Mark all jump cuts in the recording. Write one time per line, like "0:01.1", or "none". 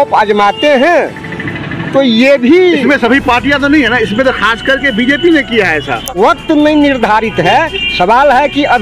0:06.2